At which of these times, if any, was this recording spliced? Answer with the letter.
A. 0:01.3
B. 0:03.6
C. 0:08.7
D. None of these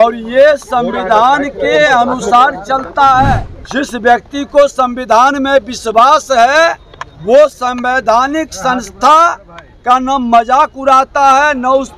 B